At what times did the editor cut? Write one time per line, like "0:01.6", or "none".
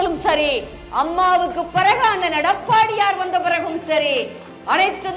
none